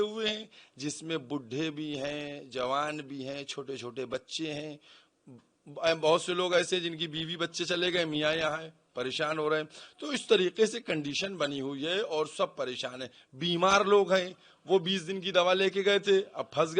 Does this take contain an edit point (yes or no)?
no